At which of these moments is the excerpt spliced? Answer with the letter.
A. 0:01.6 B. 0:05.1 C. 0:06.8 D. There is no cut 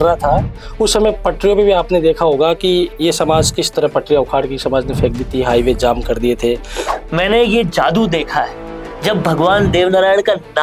C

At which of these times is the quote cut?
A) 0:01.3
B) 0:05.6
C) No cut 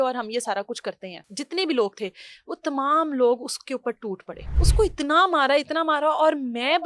A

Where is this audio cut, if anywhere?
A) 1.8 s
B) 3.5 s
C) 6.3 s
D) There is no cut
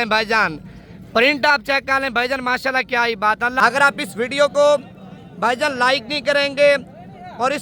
B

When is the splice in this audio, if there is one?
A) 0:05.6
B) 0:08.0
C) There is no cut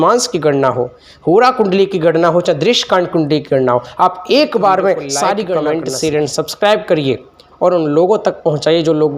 A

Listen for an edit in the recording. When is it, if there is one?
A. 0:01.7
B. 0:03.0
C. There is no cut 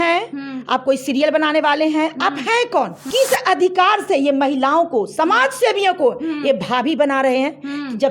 B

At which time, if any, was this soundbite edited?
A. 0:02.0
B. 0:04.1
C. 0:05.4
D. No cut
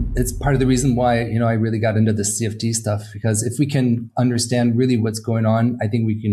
D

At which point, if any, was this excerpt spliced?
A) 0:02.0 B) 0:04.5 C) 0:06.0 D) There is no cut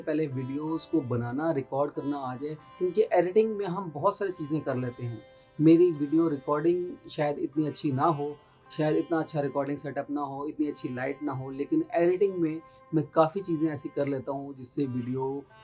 D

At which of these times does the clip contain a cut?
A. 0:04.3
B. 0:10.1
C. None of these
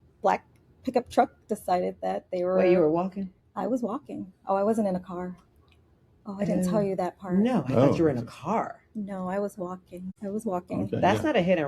B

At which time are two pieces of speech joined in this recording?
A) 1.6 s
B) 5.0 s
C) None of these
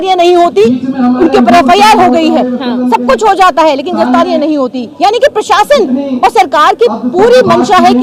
C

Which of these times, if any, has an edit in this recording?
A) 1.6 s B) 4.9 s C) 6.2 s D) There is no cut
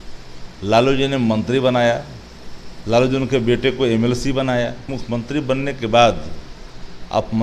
B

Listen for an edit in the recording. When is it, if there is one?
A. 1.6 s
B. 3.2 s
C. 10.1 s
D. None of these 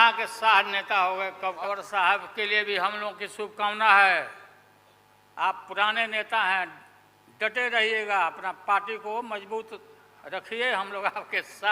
A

